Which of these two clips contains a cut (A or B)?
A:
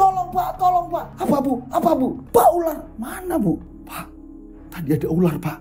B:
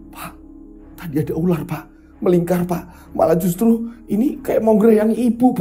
A